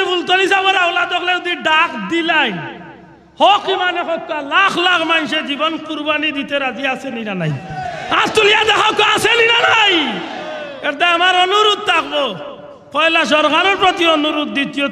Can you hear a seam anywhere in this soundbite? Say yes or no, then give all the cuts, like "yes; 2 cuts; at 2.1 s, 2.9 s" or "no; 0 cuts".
no; 0 cuts